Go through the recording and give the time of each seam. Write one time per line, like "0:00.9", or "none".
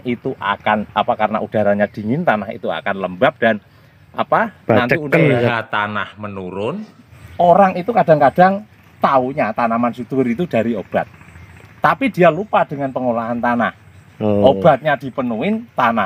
0:05.5
0:07.1